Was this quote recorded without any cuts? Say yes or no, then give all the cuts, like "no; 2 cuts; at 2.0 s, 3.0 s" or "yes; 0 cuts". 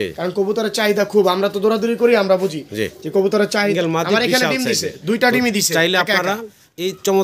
no; 1 cut; at 3.7 s